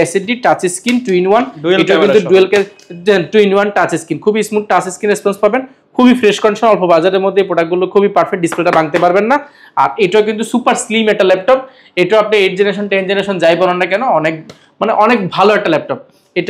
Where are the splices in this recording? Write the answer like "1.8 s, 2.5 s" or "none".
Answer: none